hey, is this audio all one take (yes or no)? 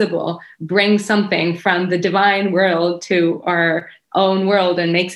yes